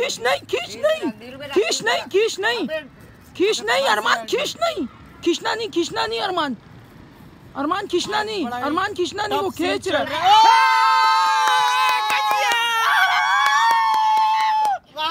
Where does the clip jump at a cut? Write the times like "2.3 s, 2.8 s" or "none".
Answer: none